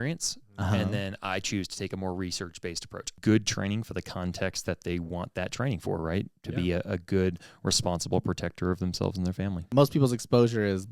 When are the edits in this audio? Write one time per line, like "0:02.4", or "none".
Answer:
0:03.2
0:09.6